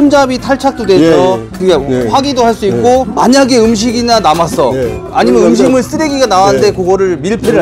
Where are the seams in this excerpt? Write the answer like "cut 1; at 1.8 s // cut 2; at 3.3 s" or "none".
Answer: cut 1; at 3.1 s